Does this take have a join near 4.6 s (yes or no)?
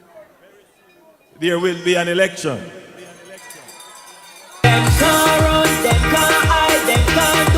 yes